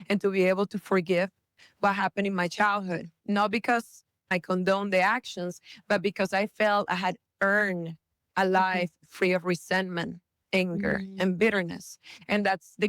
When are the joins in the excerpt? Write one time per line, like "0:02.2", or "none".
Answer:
0:03.1
0:04.3